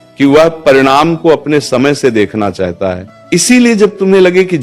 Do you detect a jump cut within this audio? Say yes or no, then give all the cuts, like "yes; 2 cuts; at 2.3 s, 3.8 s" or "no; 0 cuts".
yes; 1 cut; at 3.1 s